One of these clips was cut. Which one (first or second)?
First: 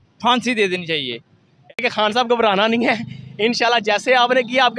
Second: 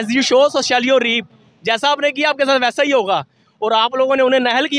first